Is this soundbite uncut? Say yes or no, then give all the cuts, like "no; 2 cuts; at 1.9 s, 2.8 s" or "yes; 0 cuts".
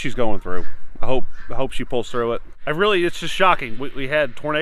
no; 1 cut; at 2.6 s